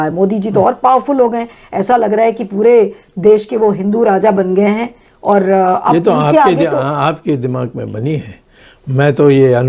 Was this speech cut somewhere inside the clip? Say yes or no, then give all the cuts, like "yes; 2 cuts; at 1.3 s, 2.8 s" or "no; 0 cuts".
no; 0 cuts